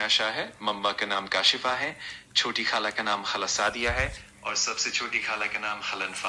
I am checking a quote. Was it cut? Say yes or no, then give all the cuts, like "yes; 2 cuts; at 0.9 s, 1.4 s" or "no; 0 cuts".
no; 0 cuts